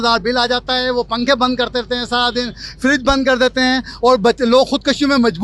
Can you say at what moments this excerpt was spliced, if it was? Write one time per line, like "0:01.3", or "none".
none